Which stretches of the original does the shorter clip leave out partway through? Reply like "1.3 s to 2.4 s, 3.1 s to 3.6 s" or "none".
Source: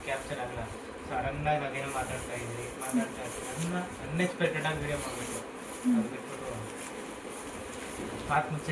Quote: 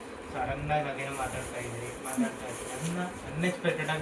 none